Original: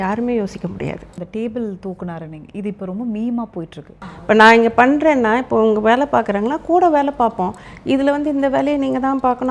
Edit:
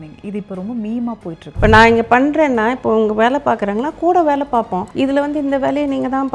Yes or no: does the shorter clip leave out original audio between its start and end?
yes